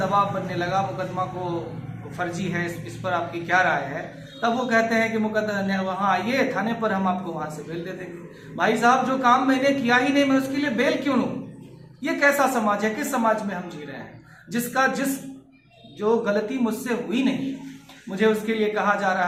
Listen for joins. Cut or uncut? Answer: uncut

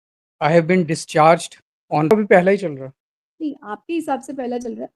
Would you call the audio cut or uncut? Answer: cut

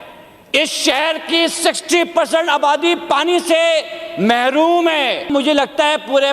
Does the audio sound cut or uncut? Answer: cut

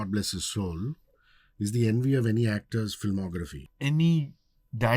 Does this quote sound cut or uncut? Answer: cut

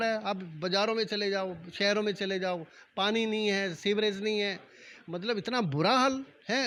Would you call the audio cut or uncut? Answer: uncut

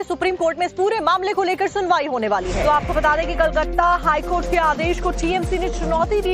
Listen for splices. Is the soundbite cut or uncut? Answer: cut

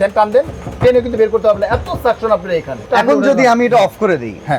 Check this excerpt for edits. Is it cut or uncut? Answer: cut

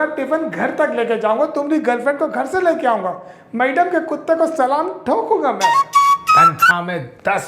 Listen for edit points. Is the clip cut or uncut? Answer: uncut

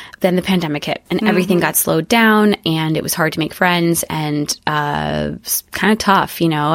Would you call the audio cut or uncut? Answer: uncut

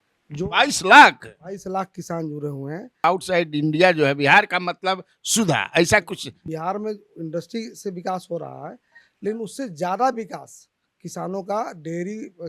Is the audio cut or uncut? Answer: cut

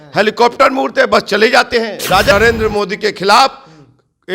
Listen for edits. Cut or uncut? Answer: cut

